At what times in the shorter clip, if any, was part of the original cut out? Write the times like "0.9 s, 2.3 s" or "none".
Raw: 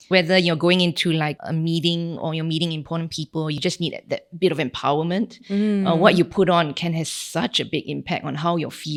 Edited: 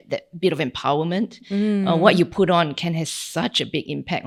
none